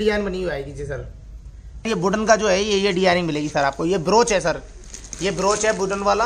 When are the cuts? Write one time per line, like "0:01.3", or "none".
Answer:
0:01.9